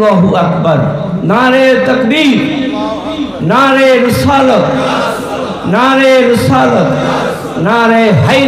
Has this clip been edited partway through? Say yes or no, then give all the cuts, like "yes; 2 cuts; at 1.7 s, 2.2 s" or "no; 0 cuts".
no; 0 cuts